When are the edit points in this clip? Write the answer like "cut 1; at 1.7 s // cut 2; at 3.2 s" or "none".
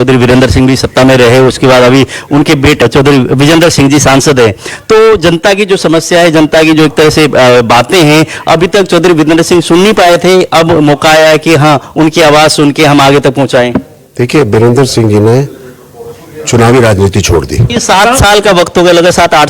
cut 1; at 2.8 s // cut 2; at 17.7 s